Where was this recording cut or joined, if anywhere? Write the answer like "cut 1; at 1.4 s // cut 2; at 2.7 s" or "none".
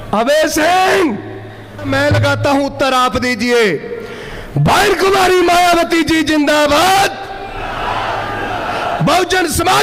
cut 1; at 1.9 s